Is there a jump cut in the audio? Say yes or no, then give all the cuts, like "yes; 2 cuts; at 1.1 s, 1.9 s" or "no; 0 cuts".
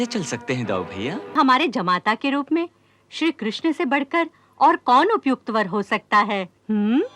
yes; 1 cut; at 1.3 s